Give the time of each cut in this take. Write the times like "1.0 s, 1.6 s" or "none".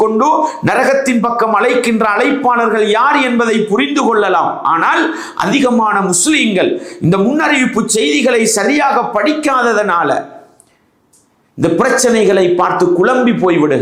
none